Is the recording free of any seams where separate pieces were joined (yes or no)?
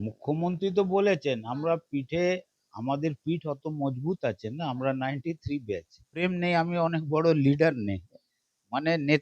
no